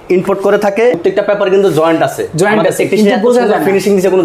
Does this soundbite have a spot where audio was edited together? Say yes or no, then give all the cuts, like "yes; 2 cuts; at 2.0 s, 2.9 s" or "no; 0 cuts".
yes; 1 cut; at 1.0 s